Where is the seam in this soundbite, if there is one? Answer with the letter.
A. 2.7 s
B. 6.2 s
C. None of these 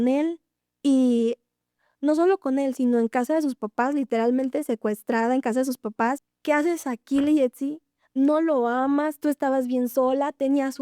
B